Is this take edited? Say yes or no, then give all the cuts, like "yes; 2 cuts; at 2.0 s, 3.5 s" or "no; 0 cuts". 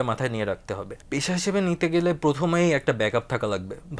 yes; 1 cut; at 1.2 s